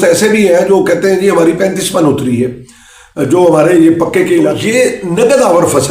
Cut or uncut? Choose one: cut